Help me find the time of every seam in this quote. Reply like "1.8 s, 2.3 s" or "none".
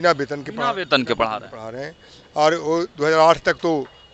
none

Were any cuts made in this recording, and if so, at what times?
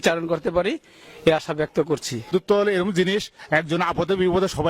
2.3 s, 3.4 s

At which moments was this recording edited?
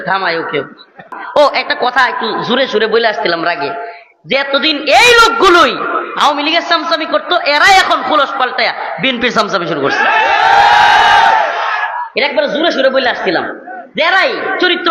1.1 s

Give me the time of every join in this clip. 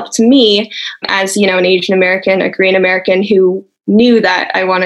1.1 s

